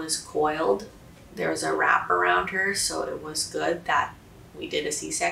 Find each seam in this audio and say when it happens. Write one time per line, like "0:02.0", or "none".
none